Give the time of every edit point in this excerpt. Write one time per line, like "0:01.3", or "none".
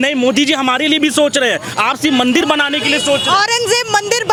none